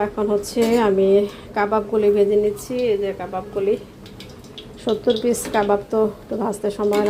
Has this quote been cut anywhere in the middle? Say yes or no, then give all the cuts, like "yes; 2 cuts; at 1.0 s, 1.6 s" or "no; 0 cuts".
no; 0 cuts